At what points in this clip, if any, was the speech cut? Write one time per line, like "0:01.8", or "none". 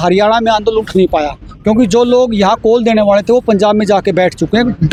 none